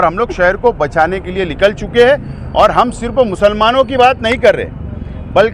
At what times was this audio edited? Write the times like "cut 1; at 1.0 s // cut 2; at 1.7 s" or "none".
none